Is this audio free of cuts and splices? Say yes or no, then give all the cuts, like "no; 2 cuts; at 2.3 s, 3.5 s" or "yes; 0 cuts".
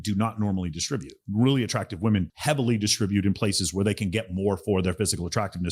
yes; 0 cuts